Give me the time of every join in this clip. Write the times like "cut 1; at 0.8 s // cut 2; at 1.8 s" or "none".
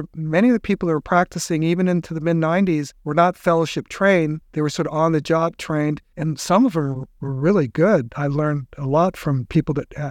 cut 1; at 3.0 s // cut 2; at 4.4 s